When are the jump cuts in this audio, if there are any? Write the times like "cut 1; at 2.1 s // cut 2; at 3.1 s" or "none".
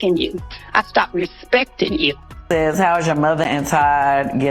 cut 1; at 2.3 s